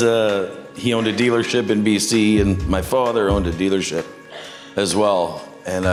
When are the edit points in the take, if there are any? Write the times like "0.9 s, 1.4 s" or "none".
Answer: none